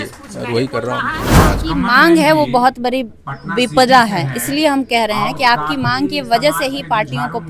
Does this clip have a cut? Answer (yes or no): yes